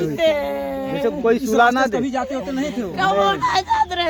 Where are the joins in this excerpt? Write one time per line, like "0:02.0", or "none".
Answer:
none

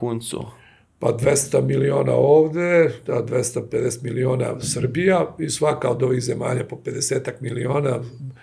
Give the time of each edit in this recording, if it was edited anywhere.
none

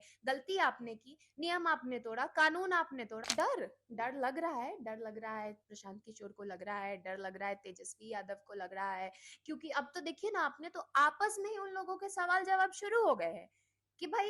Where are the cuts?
0:03.2

